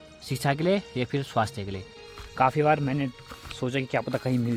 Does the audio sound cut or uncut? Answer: cut